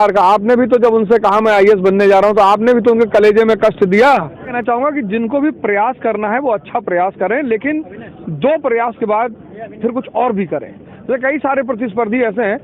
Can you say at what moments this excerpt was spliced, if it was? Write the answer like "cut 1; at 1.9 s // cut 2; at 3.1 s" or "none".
cut 1; at 4.5 s

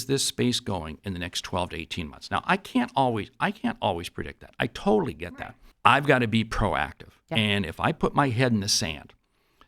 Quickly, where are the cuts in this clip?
cut 1; at 5.2 s

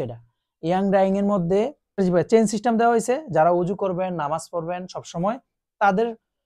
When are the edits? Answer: cut 1; at 2.0 s

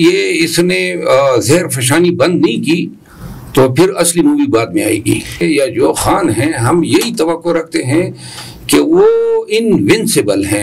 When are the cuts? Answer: cut 1; at 5.4 s

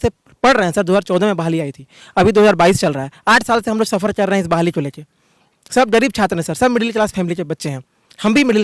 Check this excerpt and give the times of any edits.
none

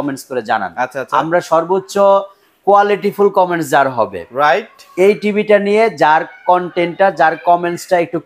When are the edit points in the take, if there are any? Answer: none

